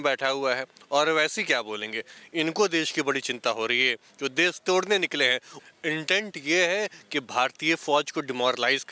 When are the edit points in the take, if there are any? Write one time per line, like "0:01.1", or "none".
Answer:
0:05.5